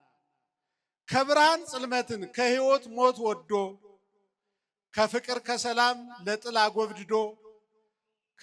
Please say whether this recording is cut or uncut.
uncut